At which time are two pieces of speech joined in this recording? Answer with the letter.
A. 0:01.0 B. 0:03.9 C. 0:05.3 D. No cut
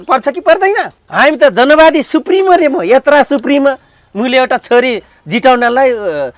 A